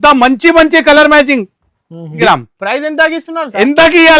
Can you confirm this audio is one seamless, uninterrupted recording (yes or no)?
no